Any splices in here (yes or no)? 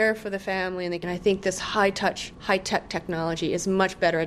yes